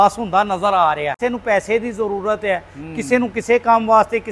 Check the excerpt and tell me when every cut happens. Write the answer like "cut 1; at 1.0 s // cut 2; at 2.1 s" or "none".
cut 1; at 1.2 s